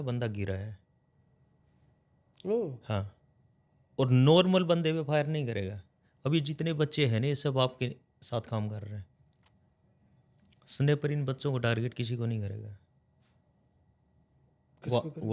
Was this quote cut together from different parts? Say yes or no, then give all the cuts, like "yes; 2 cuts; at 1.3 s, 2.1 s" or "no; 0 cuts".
no; 0 cuts